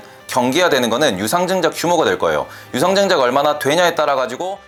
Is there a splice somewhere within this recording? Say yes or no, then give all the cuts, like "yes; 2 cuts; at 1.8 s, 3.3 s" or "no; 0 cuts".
no; 0 cuts